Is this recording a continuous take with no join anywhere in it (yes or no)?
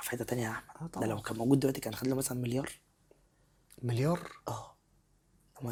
yes